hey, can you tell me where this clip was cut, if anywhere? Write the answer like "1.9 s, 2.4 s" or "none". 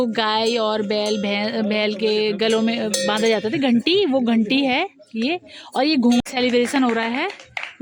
6.2 s

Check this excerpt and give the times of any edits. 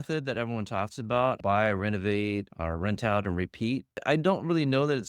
1.4 s, 2.5 s, 4.0 s

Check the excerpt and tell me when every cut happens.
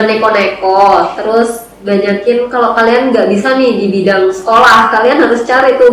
none

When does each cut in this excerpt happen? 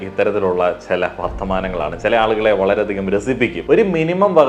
3.6 s

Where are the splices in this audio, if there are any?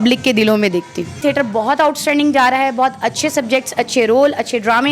1.2 s

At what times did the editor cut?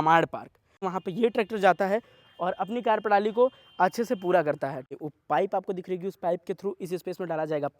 0.9 s, 4.9 s

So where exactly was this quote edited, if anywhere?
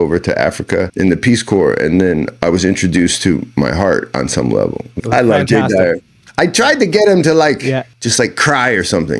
0.9 s, 4.8 s, 7.9 s

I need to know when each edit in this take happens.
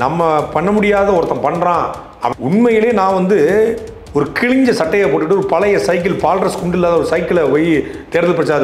2.2 s

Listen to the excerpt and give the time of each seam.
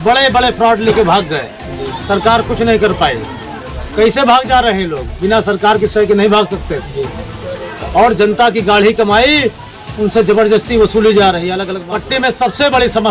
11.7 s

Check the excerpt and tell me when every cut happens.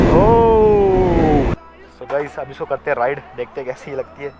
1.5 s

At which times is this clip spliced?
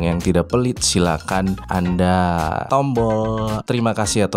1.6 s, 2.6 s, 3.6 s

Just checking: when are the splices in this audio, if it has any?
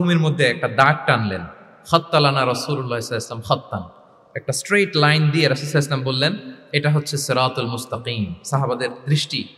none

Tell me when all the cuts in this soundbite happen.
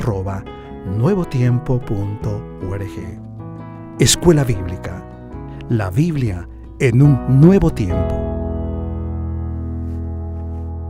7.9 s

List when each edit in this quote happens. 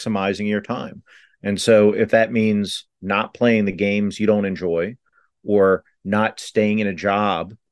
none

